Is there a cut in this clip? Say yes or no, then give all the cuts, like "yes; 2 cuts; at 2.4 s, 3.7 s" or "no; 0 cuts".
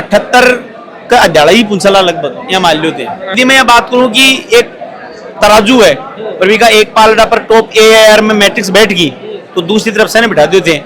yes; 1 cut; at 3.2 s